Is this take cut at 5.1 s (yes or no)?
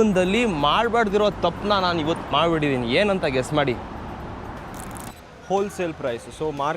yes